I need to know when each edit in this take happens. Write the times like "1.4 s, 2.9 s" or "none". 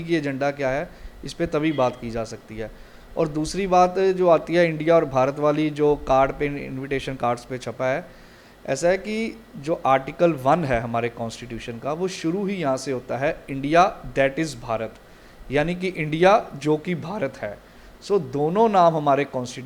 none